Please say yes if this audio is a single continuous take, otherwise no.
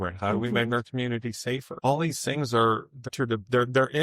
no